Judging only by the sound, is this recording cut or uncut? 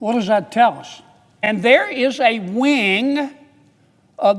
cut